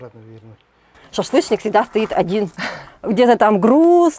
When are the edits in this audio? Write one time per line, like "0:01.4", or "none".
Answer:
0:01.0